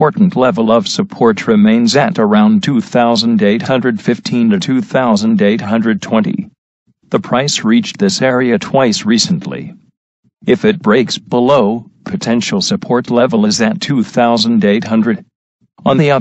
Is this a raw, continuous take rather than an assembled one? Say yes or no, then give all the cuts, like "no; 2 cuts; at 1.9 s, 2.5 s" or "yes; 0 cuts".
yes; 0 cuts